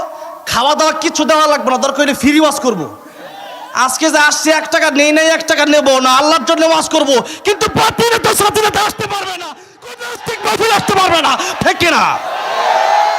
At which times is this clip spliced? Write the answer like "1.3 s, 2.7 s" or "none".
11.6 s